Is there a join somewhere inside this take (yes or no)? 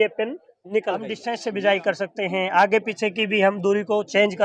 yes